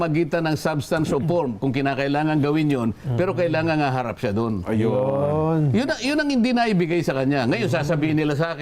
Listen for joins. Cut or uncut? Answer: uncut